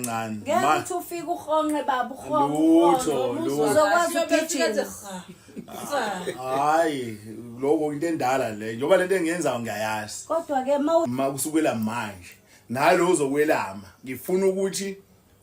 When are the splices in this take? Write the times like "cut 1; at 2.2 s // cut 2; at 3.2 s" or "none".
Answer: cut 1; at 11.1 s